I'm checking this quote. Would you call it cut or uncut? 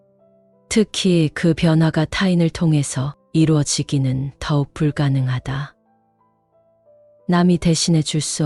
uncut